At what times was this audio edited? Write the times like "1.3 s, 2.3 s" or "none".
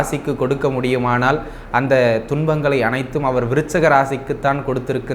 none